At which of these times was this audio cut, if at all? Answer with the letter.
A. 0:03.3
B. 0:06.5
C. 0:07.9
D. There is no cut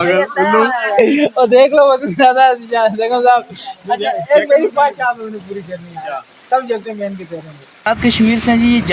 C